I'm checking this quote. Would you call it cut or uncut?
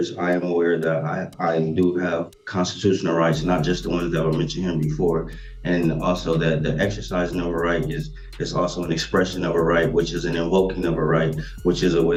uncut